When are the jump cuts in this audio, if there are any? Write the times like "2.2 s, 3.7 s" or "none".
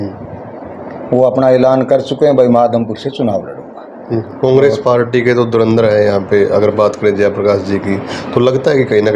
4.3 s